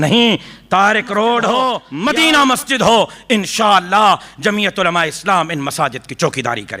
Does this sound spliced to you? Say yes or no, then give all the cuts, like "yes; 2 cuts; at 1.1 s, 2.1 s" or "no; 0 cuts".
yes; 1 cut; at 1.9 s